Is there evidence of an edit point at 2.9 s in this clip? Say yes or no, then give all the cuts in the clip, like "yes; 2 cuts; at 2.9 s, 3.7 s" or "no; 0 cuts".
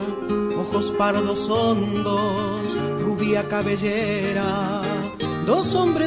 no; 0 cuts